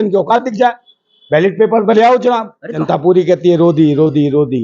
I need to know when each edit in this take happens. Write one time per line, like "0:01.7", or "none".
0:02.8